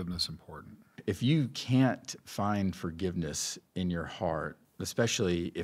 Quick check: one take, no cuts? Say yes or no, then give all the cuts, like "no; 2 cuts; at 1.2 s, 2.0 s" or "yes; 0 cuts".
no; 2 cuts; at 0.9 s, 4.6 s